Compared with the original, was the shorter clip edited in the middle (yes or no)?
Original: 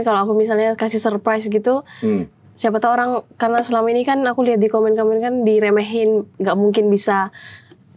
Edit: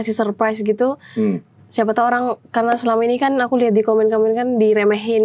no